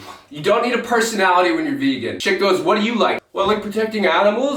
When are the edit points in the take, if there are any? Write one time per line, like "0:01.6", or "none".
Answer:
0:02.1
0:03.2